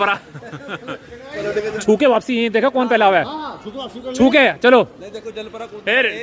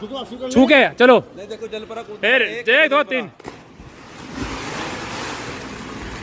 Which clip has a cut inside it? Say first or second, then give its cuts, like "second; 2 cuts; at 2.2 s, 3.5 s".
first; 1 cut; at 1.7 s